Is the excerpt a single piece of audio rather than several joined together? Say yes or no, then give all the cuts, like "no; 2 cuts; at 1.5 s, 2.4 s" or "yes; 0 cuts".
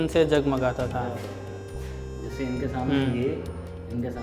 yes; 0 cuts